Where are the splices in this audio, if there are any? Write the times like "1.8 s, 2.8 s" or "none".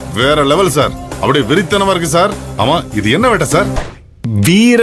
3.8 s